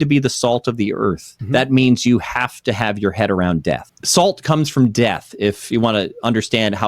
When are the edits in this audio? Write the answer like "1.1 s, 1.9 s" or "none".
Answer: 1.3 s, 3.9 s